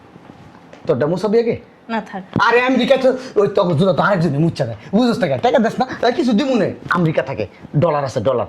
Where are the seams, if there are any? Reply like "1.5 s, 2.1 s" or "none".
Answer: none